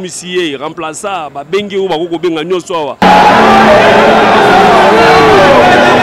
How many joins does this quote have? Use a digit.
0